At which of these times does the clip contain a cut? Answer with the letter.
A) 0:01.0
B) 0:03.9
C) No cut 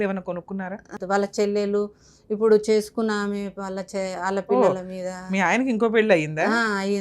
A